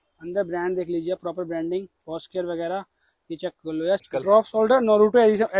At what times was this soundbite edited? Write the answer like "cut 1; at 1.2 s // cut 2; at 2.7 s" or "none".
cut 1; at 4.0 s

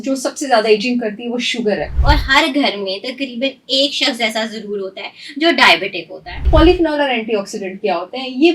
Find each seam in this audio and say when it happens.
cut 1; at 1.9 s // cut 2; at 6.5 s

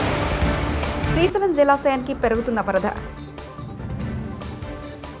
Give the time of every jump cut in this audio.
none

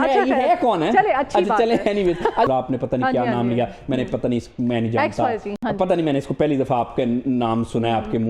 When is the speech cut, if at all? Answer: cut 1; at 2.5 s

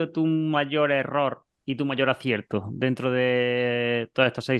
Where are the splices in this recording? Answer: none

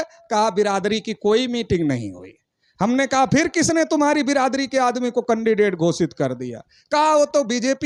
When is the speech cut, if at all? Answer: none

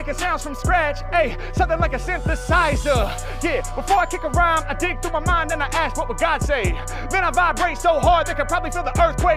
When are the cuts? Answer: none

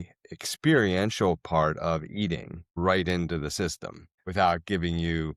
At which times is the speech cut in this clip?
cut 1; at 2.7 s // cut 2; at 4.2 s

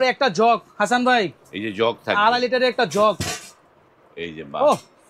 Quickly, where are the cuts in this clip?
none

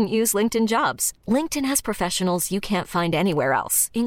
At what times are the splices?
none

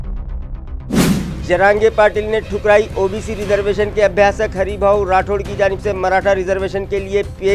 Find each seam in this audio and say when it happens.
none

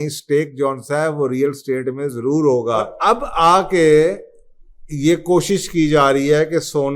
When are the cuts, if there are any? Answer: cut 1; at 2.9 s

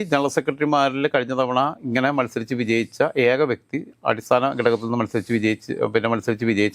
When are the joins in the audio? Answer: none

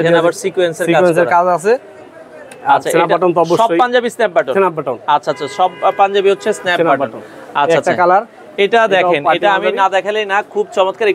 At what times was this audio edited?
none

